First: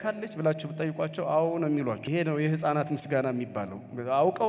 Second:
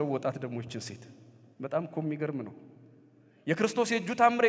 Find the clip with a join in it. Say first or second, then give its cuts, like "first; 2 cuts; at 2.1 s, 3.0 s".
first; 1 cut; at 2.0 s